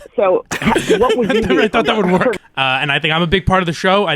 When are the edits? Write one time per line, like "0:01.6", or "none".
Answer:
0:02.3